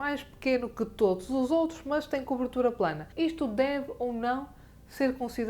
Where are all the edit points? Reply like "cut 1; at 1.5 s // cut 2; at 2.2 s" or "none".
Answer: cut 1; at 3.0 s